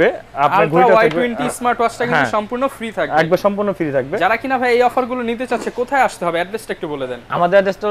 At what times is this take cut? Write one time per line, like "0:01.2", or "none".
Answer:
none